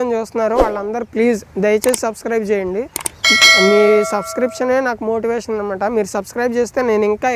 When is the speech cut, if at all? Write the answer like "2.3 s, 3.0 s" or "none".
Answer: none